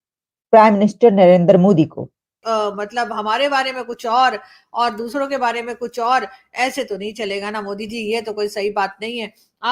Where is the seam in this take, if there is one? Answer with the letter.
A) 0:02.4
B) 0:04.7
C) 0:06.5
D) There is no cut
A